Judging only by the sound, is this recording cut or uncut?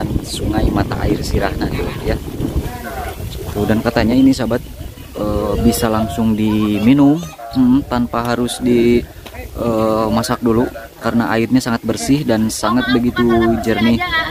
cut